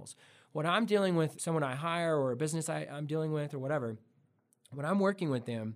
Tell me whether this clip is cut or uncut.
cut